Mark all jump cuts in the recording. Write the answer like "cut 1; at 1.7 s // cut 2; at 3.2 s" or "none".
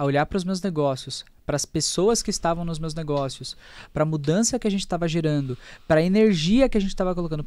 none